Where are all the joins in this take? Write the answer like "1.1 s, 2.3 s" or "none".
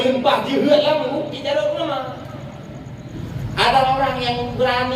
3.3 s